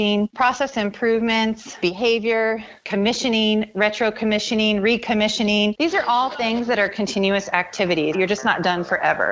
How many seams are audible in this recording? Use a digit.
1